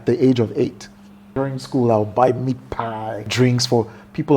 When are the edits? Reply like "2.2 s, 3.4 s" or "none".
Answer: 1.3 s, 3.3 s

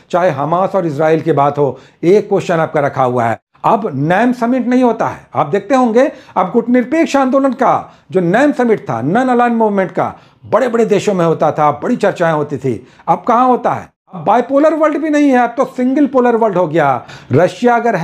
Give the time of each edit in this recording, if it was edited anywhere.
3.4 s, 14.2 s

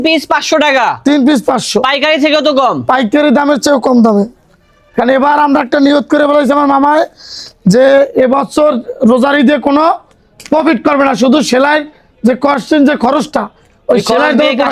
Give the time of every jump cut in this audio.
none

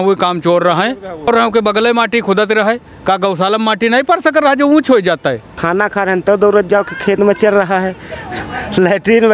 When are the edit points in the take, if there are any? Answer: 1.3 s, 5.5 s

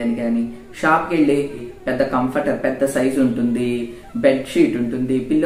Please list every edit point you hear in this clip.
1.6 s

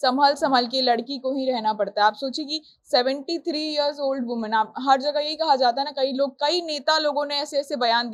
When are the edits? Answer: none

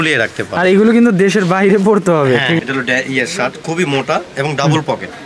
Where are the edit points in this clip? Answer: 2.6 s

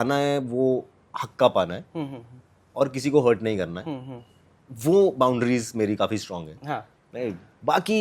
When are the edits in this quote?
none

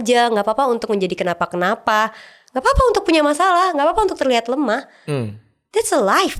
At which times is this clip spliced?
none

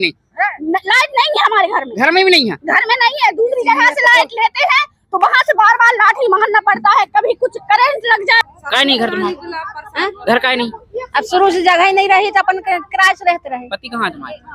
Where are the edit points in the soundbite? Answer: 8.4 s

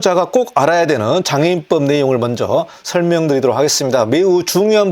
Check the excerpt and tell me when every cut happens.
2.8 s

